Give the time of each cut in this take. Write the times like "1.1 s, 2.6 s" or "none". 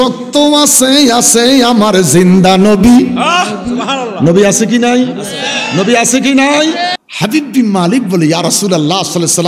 7.0 s